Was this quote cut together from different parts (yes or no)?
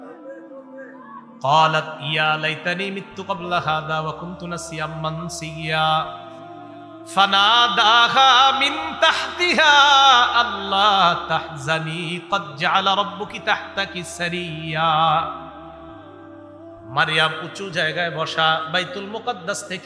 no